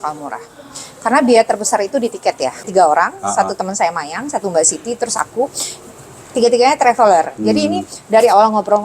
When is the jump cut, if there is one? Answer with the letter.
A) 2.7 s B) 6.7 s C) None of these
A